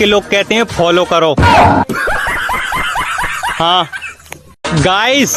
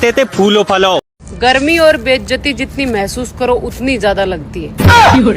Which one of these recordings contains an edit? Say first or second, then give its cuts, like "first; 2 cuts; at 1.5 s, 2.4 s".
second; 1 cut; at 1.2 s